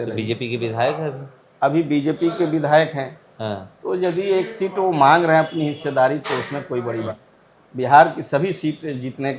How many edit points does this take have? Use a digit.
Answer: 1